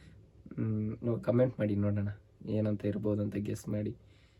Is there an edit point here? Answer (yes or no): no